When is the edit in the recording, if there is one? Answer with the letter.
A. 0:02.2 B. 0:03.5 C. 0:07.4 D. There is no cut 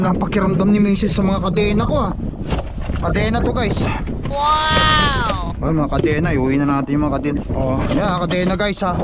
C